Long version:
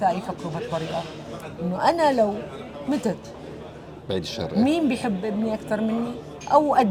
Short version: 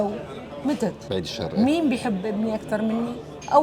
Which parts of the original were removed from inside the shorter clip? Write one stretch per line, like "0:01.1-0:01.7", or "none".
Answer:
0:03.2-0:04.0